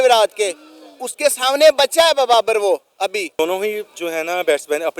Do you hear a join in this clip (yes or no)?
yes